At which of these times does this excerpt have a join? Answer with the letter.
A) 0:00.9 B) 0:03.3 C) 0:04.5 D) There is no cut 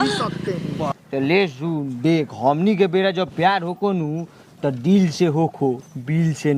A